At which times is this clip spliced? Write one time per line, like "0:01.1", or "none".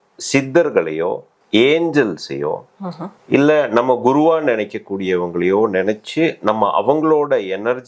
0:01.3